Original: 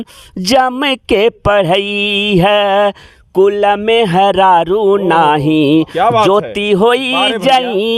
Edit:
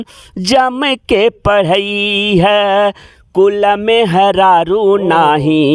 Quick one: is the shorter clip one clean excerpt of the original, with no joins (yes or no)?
yes